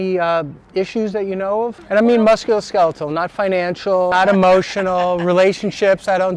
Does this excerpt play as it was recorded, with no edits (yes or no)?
no